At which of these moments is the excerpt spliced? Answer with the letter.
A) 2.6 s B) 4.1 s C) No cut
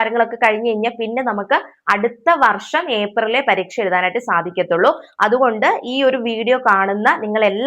C